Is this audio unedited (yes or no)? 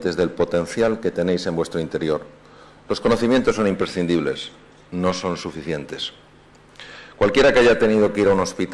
no